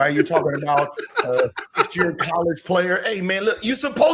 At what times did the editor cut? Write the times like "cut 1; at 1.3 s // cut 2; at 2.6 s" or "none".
none

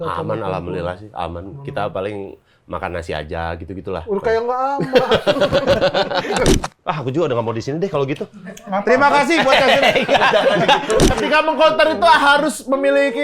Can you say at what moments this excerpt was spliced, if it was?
cut 1; at 6.5 s // cut 2; at 11.1 s

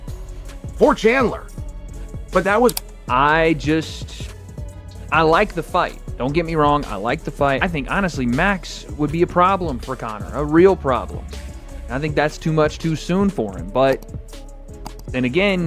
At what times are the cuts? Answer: cut 1; at 2.7 s

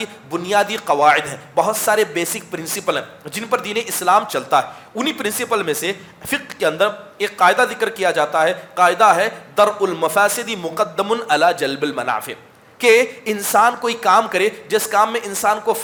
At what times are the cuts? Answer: none

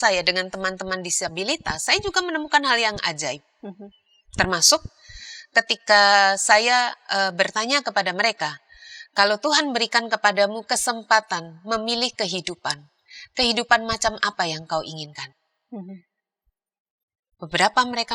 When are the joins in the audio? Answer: none

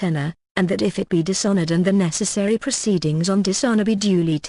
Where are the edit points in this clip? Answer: none

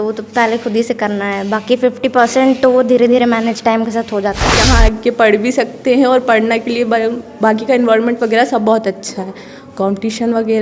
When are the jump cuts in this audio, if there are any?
cut 1; at 4.5 s

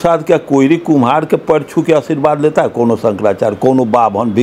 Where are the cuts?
none

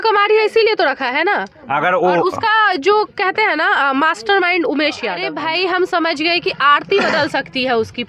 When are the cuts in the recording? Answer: cut 1; at 5.2 s

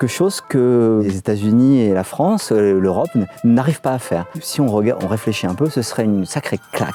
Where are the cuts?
cut 1; at 1.1 s // cut 2; at 4.4 s

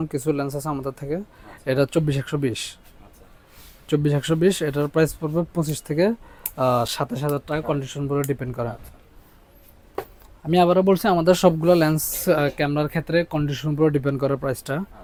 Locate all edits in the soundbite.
none

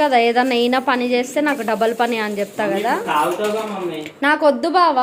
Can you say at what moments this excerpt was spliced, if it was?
none

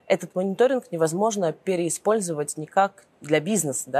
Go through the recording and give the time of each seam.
cut 1; at 3.1 s

